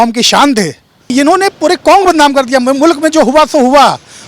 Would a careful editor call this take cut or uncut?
cut